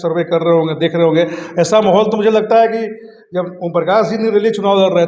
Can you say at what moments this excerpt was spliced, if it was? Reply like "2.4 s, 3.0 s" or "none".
none